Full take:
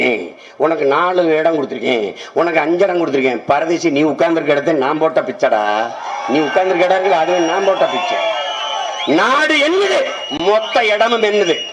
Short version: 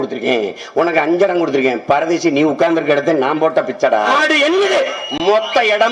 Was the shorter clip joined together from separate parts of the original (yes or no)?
yes